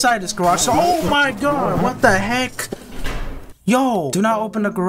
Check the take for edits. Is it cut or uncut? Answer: uncut